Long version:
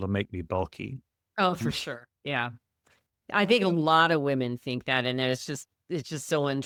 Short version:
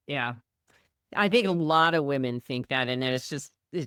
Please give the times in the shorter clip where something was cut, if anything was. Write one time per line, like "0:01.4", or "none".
none